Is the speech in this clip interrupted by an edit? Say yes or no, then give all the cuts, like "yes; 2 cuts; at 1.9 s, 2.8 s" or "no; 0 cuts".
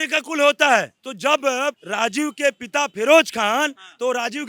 yes; 1 cut; at 1.0 s